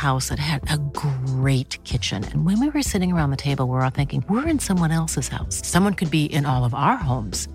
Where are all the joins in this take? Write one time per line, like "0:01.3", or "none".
none